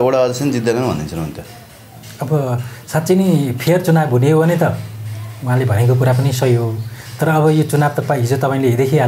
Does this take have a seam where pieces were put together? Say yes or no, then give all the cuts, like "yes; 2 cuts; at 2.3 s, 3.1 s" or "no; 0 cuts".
no; 0 cuts